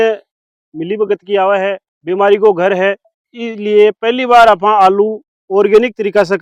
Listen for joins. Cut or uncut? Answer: cut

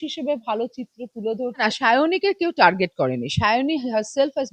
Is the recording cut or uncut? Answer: cut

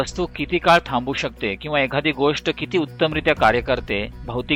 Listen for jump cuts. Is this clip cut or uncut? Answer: uncut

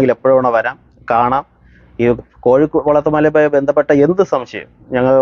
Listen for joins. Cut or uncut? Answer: uncut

